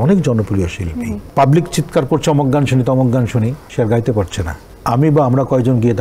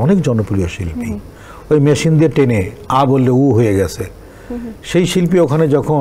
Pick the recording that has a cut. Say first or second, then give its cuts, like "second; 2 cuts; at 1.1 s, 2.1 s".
first; 3 cuts; at 1.2 s, 3.6 s, 4.6 s